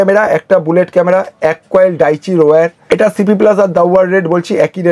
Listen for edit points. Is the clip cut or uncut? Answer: uncut